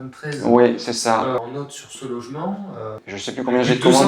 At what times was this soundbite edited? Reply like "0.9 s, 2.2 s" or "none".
1.4 s, 3.0 s